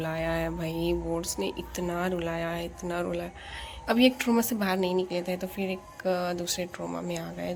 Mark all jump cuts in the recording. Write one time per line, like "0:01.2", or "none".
none